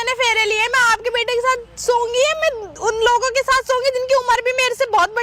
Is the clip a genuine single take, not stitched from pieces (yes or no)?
yes